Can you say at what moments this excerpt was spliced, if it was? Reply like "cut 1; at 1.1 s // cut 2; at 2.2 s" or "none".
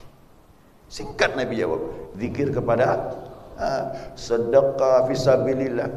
none